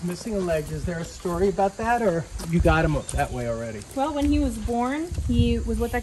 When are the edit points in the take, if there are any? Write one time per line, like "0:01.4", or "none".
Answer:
0:03.8
0:05.2